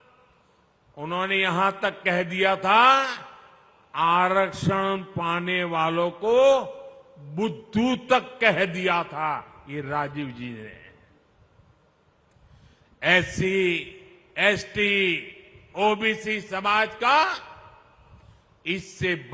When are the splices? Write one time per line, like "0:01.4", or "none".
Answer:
none